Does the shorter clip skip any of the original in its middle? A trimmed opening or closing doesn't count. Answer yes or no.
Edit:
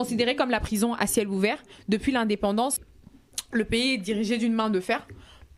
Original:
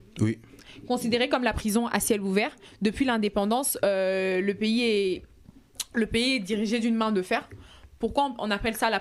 yes